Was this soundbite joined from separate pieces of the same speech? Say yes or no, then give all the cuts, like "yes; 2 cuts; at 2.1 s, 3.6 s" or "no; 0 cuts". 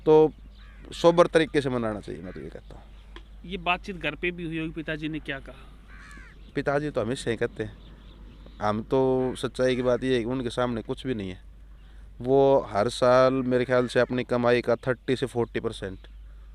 no; 0 cuts